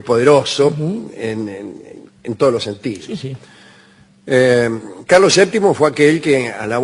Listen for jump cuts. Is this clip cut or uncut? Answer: uncut